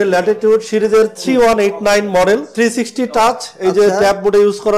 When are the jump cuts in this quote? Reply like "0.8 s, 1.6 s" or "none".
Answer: 2.5 s